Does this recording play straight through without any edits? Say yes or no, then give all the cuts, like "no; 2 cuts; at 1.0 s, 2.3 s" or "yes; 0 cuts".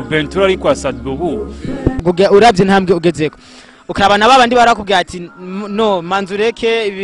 no; 1 cut; at 2.0 s